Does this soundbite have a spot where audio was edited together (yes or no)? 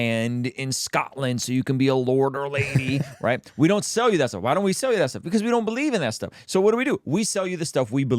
no